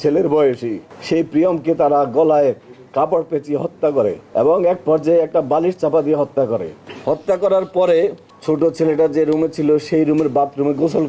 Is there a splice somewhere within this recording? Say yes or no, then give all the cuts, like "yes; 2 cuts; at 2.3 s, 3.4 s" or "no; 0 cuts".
yes; 2 cuts; at 4.2 s, 8.3 s